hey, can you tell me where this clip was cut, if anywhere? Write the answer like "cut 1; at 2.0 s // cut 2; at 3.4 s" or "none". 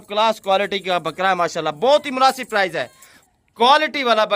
cut 1; at 3.1 s